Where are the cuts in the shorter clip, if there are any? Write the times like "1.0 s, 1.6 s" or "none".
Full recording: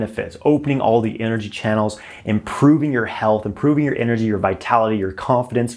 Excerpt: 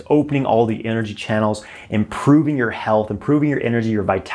none